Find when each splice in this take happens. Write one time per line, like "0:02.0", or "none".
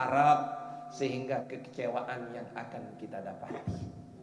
0:01.5